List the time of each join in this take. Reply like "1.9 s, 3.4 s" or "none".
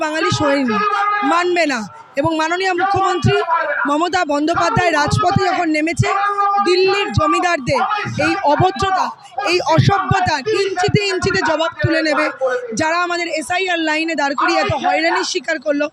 none